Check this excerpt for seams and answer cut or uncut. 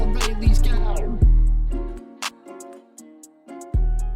uncut